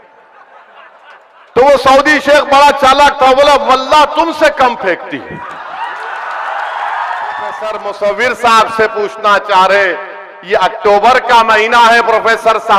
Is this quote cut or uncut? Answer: cut